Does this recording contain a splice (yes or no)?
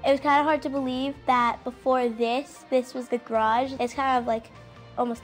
no